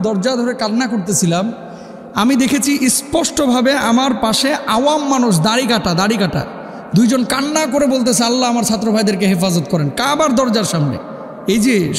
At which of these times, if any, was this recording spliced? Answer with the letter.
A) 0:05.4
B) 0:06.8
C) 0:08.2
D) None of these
D